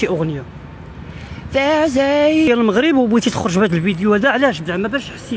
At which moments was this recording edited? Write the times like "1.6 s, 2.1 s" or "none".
2.5 s